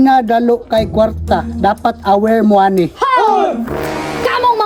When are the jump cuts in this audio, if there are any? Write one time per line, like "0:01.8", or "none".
none